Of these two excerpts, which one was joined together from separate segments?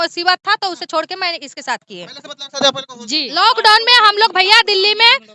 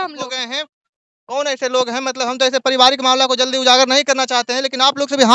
first; 1 cut; at 3.3 s

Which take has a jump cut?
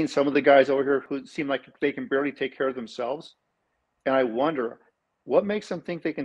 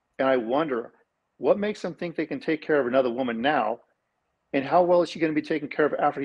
first; 1 cut; at 1.0 s

